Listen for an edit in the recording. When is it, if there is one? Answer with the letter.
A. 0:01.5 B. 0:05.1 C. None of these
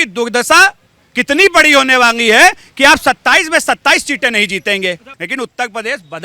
B